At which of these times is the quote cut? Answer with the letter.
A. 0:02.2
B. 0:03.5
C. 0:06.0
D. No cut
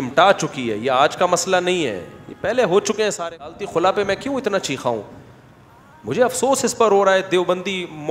B